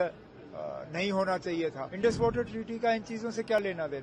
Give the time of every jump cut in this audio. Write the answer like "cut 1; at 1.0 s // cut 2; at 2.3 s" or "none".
cut 1; at 1.9 s